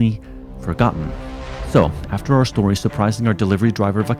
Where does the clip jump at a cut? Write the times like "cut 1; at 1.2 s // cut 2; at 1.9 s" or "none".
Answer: cut 1; at 1.8 s